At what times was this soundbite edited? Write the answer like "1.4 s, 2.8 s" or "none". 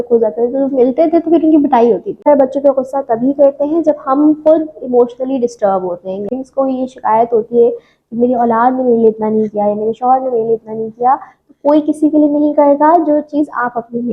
2.2 s, 6.3 s